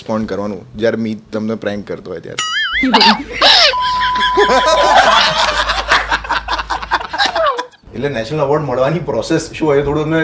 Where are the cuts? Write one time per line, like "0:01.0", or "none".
0:07.8